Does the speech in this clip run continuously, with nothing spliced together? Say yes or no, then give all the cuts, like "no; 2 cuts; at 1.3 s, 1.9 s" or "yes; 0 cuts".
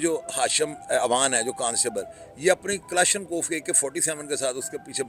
yes; 0 cuts